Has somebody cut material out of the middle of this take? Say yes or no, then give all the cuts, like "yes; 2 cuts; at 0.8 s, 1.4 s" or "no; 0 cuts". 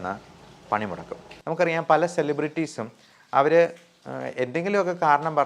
yes; 1 cut; at 1.3 s